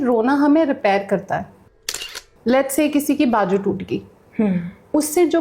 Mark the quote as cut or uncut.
cut